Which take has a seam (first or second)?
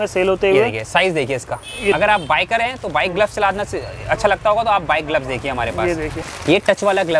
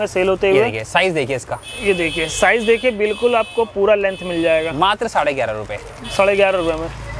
first